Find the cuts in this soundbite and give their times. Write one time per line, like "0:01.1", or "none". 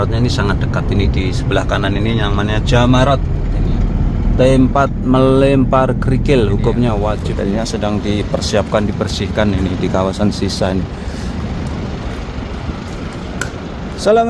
0:07.3